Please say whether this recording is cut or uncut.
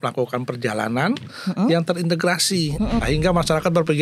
cut